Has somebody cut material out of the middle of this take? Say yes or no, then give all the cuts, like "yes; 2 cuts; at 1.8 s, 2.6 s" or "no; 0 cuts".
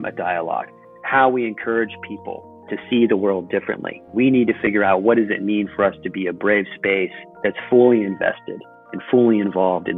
yes; 1 cut; at 7.2 s